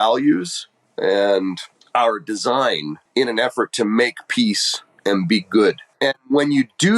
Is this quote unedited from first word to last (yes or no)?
no